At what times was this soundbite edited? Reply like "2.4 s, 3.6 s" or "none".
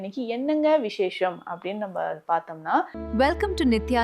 3.0 s